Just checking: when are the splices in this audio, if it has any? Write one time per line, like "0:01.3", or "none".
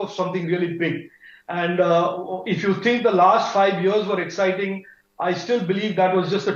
none